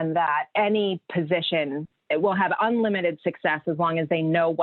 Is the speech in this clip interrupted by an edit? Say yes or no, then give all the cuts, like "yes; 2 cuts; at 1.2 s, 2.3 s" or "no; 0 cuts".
yes; 1 cut; at 1.9 s